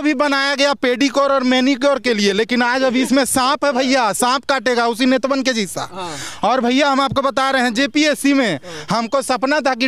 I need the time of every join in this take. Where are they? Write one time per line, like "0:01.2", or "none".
none